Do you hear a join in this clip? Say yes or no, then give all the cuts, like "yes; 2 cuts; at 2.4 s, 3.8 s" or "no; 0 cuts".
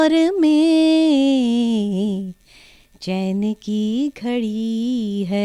no; 0 cuts